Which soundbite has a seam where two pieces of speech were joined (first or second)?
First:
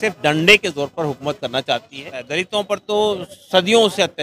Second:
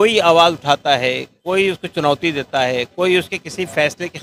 first